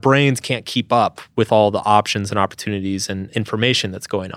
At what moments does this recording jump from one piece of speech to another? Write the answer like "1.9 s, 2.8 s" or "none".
3.1 s